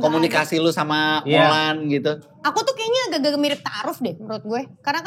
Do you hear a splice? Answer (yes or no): no